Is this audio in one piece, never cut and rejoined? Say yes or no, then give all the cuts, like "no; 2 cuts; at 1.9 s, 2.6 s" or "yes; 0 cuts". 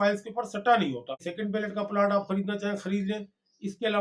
no; 1 cut; at 1.3 s